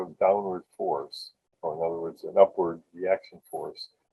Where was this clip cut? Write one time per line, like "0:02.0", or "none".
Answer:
none